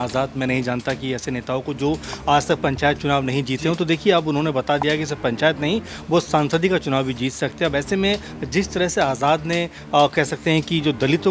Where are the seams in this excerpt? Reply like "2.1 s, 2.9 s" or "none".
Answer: none